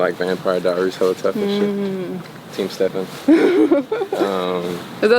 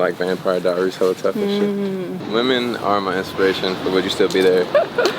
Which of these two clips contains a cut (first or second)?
second